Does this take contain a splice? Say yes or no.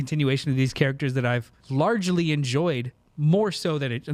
yes